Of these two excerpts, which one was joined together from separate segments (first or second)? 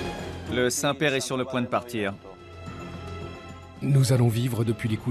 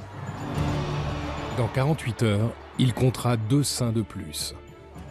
second